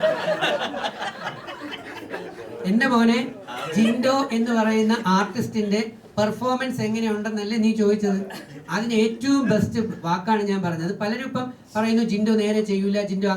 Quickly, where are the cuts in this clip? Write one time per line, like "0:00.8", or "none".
none